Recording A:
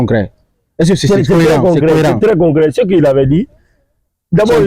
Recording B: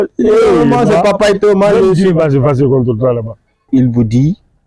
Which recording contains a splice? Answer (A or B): B